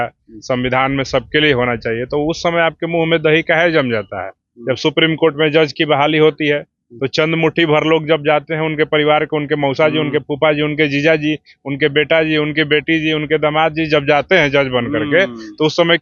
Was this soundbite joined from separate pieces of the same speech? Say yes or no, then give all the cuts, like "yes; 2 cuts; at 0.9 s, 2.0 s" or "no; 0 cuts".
no; 0 cuts